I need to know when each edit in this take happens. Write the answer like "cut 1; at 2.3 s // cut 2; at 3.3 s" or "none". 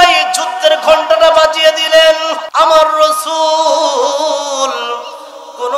cut 1; at 2.4 s